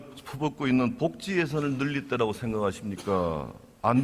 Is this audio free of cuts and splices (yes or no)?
no